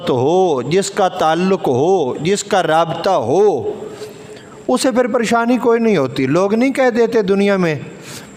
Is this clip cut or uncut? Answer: uncut